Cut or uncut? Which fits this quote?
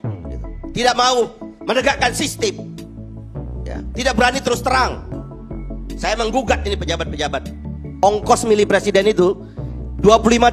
cut